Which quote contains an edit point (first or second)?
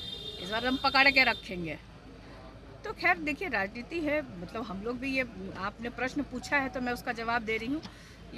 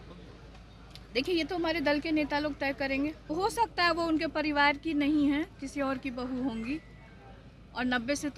second